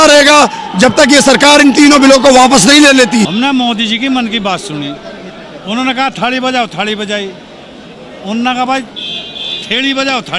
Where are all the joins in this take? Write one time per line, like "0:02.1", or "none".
0:03.3